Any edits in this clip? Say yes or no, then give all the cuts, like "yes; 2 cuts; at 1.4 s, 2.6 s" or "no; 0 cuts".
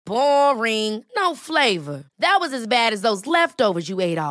no; 0 cuts